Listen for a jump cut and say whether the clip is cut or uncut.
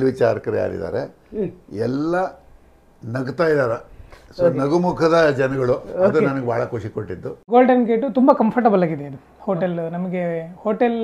cut